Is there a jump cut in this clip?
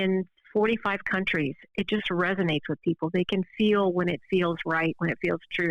no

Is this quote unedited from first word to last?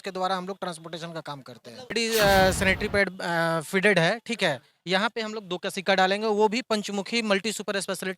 no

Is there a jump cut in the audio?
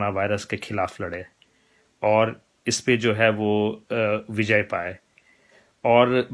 no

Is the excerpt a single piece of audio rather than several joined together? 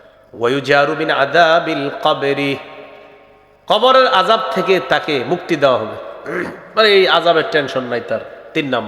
yes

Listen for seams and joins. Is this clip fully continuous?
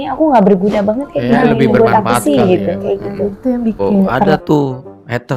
no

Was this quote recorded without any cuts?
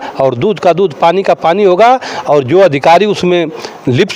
yes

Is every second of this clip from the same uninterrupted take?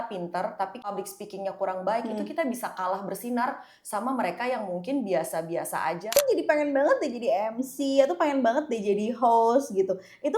no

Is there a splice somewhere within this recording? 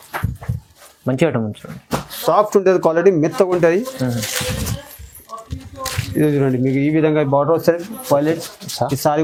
no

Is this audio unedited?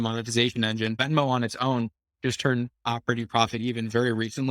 no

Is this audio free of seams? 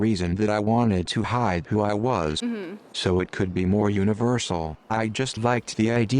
no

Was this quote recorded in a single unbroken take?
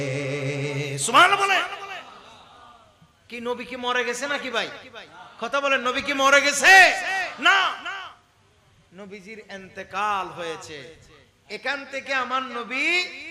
yes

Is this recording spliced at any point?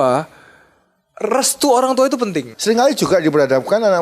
yes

